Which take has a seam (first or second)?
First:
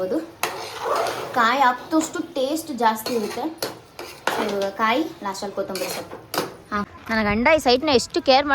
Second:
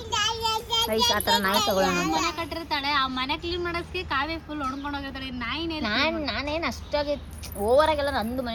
first